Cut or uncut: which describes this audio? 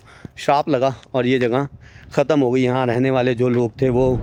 uncut